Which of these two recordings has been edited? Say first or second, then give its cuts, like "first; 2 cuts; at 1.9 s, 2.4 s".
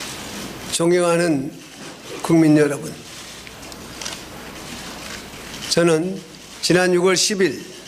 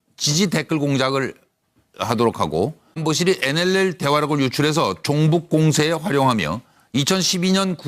second; 1 cut; at 1.3 s